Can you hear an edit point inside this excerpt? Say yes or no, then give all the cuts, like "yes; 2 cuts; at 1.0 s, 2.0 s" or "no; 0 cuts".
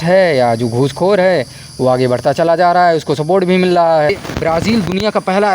yes; 1 cut; at 4.1 s